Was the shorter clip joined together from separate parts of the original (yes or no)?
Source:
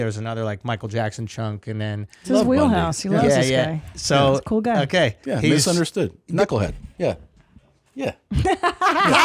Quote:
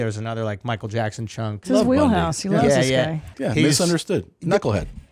yes